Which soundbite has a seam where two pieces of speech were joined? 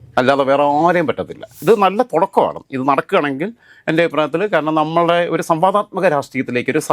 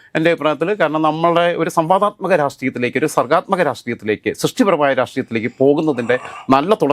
first; 1 cut; at 1.6 s

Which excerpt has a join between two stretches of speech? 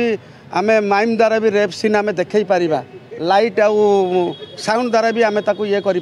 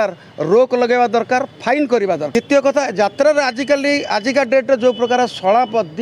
second; 1 cut; at 2.3 s

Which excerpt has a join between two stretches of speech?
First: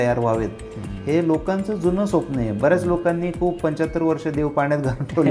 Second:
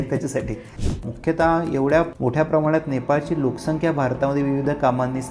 second; 2 cuts; at 1.0 s, 2.1 s

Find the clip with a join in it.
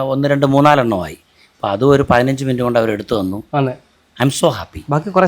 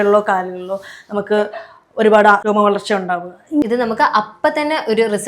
second; 2 cuts; at 2.4 s, 3.6 s

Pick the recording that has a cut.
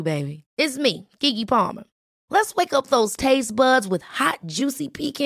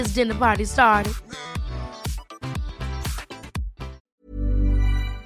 second; 1 cut; at 4.0 s

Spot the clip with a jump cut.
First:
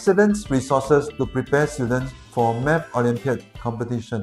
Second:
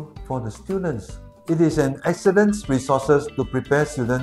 second; 1 cut; at 1.3 s

